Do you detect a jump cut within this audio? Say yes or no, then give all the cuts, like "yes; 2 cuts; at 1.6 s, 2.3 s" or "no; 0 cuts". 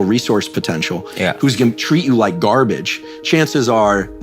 no; 0 cuts